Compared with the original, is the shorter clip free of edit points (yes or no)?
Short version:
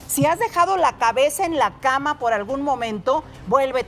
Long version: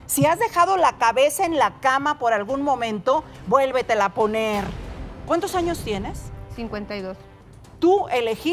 yes